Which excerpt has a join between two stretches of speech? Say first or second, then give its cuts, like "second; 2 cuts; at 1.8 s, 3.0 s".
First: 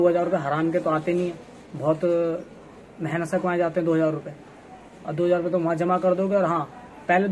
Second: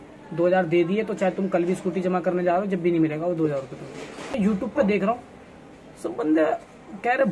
second; 1 cut; at 4.3 s